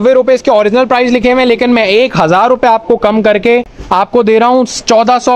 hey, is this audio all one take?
yes; 0 cuts

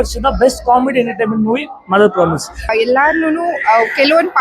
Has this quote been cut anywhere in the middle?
yes; 1 cut; at 2.7 s

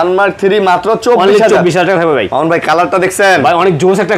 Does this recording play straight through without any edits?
yes; 0 cuts

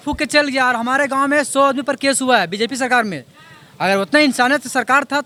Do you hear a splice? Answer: no; 0 cuts

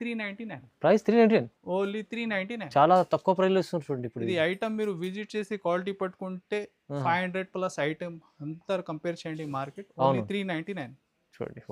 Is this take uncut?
yes; 0 cuts

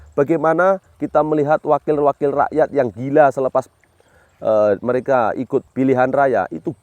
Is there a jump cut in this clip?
yes; 1 cut; at 5.7 s

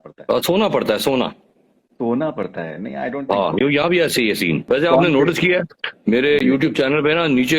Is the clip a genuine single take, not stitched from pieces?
no; 1 cut; at 4.6 s

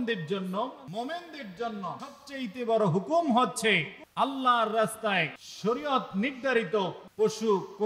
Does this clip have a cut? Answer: yes; 5 cuts; at 0.8 s, 2.2 s, 4.0 s, 5.4 s, 7.0 s

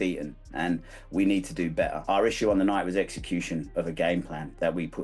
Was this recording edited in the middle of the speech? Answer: yes; 1 cut; at 2.0 s

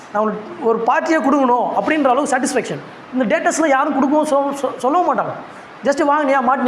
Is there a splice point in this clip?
no; 0 cuts

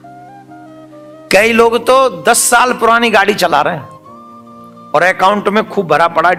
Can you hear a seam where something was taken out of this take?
no; 0 cuts

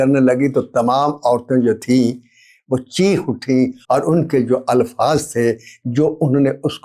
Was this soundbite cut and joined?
yes; 1 cut; at 3.8 s

